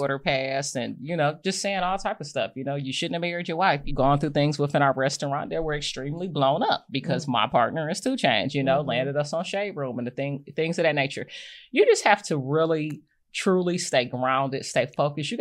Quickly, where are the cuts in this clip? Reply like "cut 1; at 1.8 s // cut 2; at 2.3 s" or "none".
cut 1; at 3.9 s